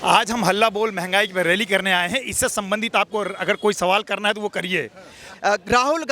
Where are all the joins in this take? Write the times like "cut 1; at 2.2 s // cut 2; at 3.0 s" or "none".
cut 1; at 5.2 s

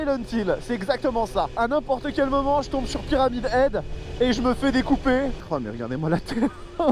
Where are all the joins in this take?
cut 1; at 1.6 s // cut 2; at 5.4 s

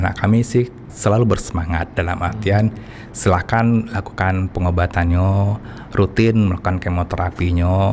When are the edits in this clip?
cut 1; at 0.9 s

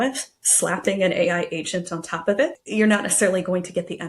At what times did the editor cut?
cut 1; at 2.5 s

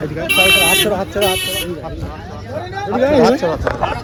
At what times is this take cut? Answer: none

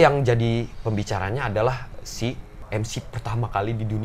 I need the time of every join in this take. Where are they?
cut 1; at 2.5 s

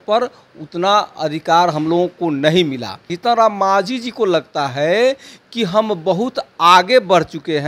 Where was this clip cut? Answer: cut 1; at 3.1 s

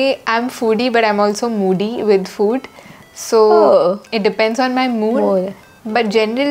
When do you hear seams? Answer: none

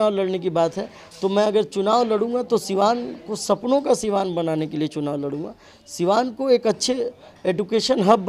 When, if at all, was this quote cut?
none

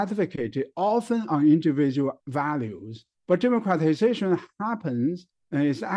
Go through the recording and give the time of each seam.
cut 1; at 2.2 s

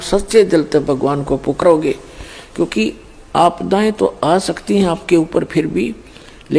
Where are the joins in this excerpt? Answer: cut 1; at 1.6 s

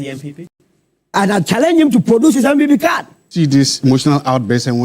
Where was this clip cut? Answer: cut 1; at 3.3 s

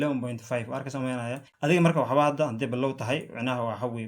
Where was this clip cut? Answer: cut 1; at 1.5 s

